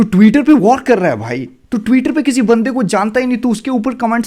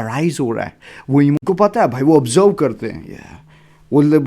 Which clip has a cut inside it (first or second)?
second